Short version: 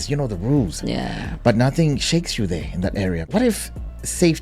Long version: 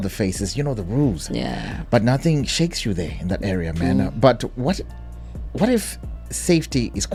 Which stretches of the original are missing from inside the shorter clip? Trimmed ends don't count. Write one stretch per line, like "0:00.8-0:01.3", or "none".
0:03.7-0:05.5